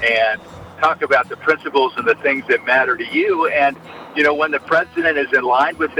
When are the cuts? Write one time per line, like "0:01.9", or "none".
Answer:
none